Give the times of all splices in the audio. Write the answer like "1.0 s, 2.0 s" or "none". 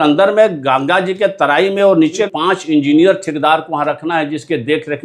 2.3 s

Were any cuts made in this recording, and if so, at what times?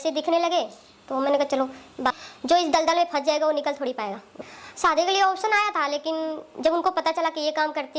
2.2 s, 4.3 s

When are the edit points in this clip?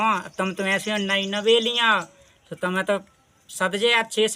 none

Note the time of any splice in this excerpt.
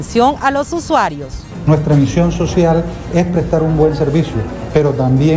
1.4 s

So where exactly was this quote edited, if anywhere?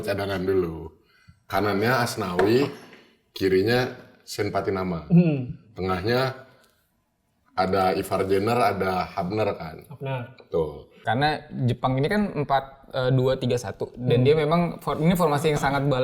10.9 s

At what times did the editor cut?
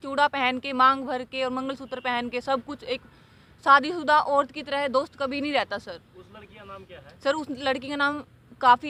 none

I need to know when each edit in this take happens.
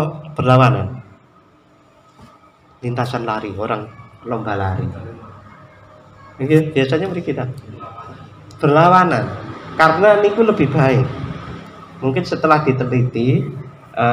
none

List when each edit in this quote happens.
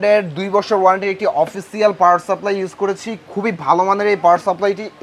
none

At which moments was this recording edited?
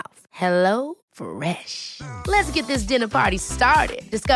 none

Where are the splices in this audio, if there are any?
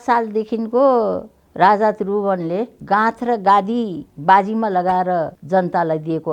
2.8 s, 4.0 s, 5.4 s

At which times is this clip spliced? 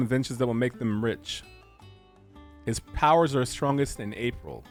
none

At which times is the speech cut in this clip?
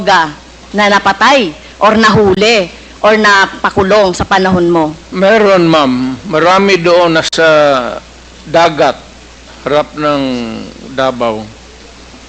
5.0 s

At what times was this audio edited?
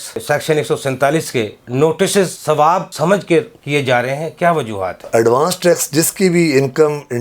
5.0 s

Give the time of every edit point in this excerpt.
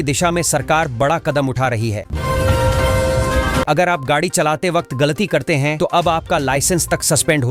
2.1 s, 3.7 s

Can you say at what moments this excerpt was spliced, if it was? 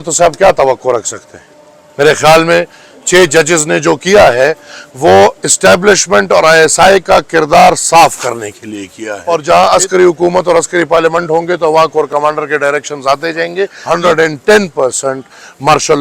9.1 s, 13.8 s

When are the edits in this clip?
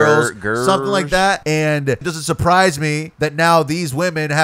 1.4 s, 2.1 s, 3.1 s

